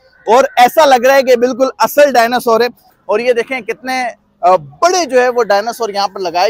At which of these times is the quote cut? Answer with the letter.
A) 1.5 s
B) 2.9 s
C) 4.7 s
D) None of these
B